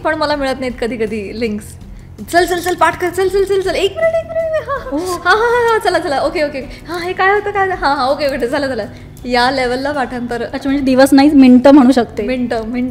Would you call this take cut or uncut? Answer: uncut